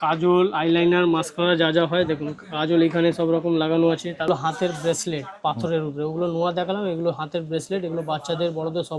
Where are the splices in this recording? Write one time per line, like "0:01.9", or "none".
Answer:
0:04.3